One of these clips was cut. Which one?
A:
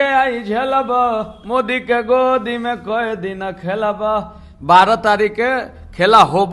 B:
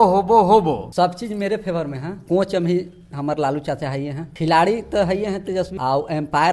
B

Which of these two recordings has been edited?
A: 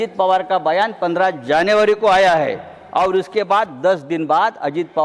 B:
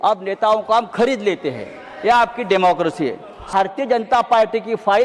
B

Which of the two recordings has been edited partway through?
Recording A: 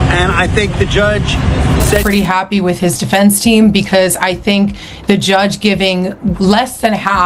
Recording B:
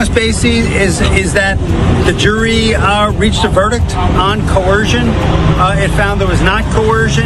A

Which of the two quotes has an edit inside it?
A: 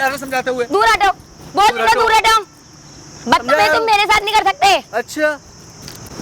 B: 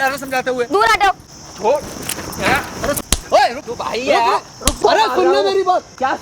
B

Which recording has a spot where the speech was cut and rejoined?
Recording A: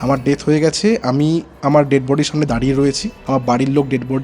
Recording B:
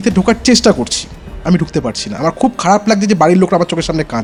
A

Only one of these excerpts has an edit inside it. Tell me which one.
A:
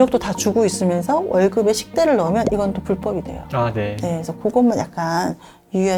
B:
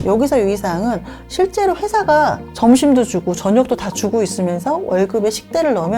B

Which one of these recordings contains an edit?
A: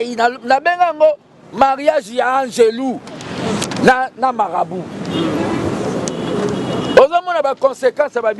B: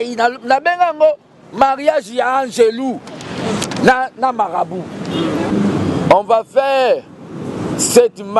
B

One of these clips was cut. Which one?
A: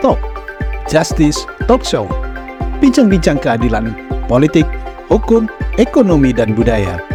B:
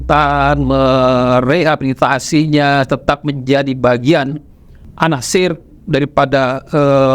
B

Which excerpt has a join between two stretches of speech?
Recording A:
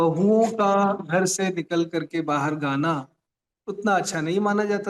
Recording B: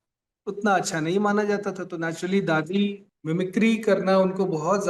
B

